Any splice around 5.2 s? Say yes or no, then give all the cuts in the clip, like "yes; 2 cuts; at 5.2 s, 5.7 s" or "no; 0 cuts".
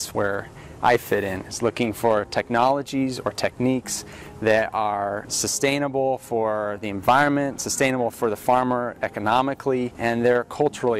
yes; 2 cuts; at 5.2 s, 9.9 s